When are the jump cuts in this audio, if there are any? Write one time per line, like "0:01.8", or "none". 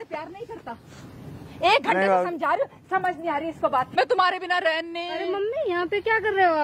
0:03.9